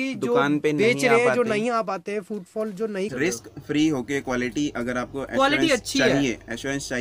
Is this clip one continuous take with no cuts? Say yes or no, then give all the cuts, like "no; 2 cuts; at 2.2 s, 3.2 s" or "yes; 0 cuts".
no; 1 cut; at 3.1 s